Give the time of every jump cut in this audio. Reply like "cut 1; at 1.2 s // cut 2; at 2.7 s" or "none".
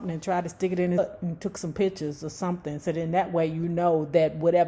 cut 1; at 1.0 s